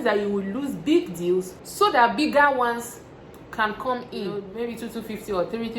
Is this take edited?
yes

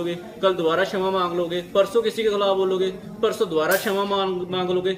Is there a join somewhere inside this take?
no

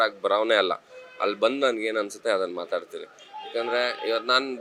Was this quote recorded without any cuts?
yes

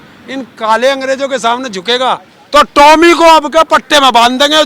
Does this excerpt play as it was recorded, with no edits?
no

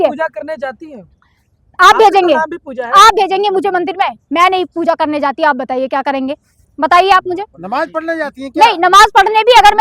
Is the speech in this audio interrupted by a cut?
no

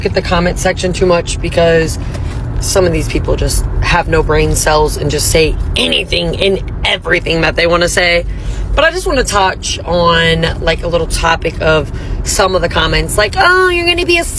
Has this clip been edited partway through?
no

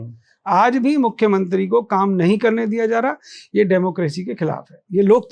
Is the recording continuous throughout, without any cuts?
yes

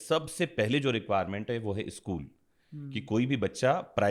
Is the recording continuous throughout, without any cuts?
yes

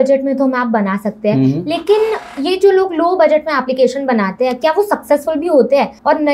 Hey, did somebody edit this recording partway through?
no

